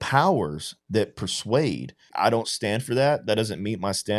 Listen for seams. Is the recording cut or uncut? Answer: cut